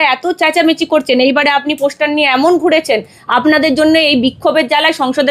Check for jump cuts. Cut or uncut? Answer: uncut